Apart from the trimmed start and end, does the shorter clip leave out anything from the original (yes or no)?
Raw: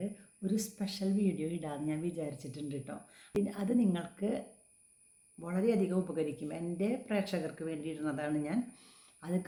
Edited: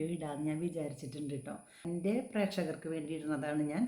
yes